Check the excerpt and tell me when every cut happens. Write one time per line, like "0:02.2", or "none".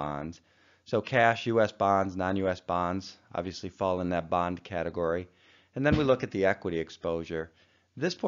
0:07.3